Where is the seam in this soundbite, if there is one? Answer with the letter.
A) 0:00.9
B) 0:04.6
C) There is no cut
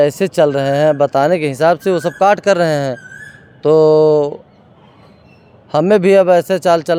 C